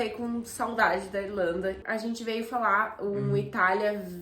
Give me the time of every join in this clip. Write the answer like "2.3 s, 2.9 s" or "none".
1.8 s